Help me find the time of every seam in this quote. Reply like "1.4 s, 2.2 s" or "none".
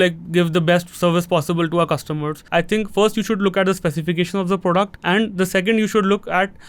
2.3 s, 5.0 s